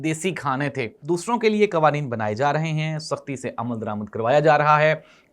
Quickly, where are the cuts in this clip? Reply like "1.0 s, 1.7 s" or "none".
0.9 s